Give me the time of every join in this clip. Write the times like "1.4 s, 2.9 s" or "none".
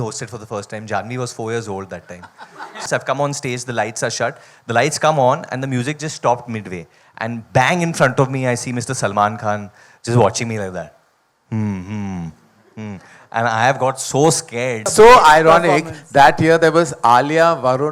2.8 s, 14.9 s

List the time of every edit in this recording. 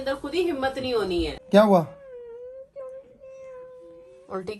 1.4 s

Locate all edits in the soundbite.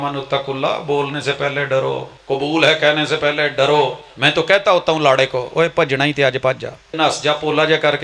2.1 s, 4.1 s, 7.0 s

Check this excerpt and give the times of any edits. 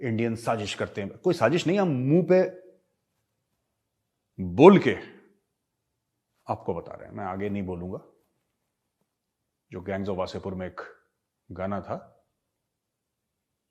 none

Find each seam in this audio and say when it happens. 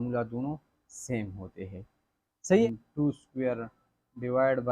2.7 s

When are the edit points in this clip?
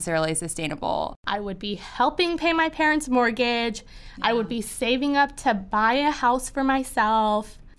1.2 s

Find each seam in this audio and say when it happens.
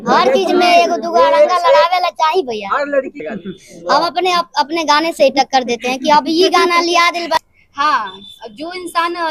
3.2 s, 7.4 s

